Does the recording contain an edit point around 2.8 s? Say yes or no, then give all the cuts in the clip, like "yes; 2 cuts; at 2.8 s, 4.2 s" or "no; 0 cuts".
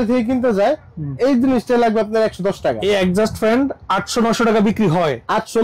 yes; 1 cut; at 2.8 s